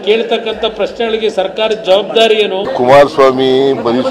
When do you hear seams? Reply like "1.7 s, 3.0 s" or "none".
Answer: 2.6 s